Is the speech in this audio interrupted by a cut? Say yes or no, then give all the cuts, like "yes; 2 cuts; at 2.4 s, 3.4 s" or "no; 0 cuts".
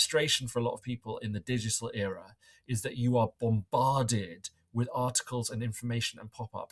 no; 0 cuts